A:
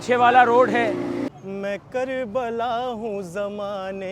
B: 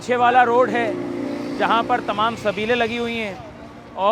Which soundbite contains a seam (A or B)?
A